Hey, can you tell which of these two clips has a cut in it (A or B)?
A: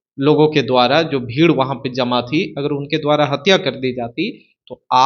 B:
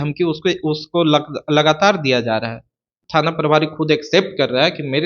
B